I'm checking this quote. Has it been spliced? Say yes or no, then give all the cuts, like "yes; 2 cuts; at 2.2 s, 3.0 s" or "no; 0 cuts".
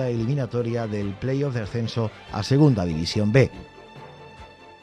yes; 1 cut; at 3.5 s